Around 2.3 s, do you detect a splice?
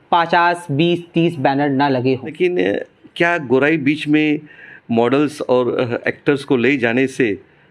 yes; 1 cut; at 2.3 s

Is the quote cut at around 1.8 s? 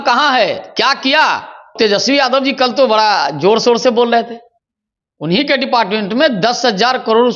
yes; 1 cut; at 1.8 s

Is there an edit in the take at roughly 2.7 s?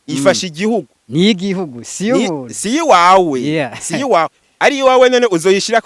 no; 2 cuts; at 1.0 s, 4.4 s

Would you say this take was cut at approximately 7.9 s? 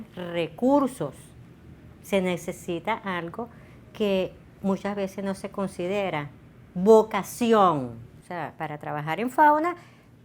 yes; 1 cut; at 7.9 s

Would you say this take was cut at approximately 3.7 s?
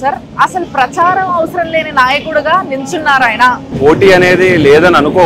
yes; 1 cut; at 3.7 s

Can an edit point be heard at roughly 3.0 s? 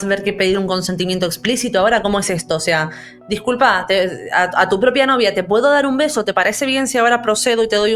no; 0 cuts

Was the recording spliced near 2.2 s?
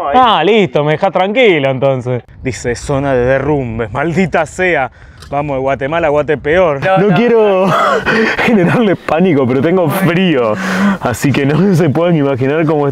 yes; 2 cuts; at 2.2 s, 6.8 s

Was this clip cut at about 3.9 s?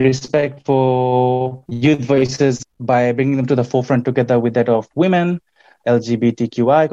no; 3 cuts; at 1.6 s, 2.6 s, 5.8 s

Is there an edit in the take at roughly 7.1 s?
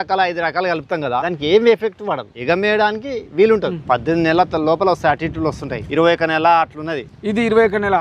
no; 4 cuts; at 1.2 s, 2.3 s, 3.8 s, 5.7 s

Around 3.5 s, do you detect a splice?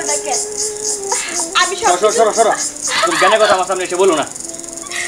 no; 0 cuts

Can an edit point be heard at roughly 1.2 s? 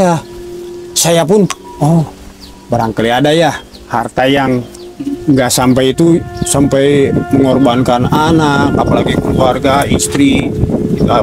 no; 0 cuts

